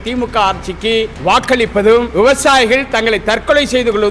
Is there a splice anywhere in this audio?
yes; 2 cuts; at 1.1 s, 2.1 s

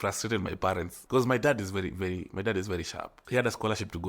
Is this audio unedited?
no; 1 cut; at 0.9 s

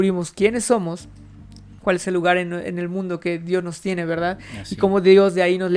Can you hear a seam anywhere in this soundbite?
no; 0 cuts

